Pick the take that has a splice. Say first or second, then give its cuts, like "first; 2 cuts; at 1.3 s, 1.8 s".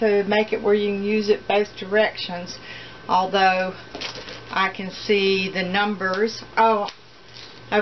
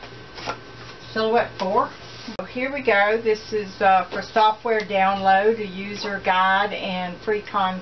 second; 1 cut; at 2.4 s